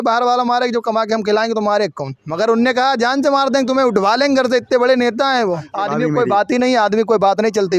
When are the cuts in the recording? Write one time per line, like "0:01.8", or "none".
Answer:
0:05.7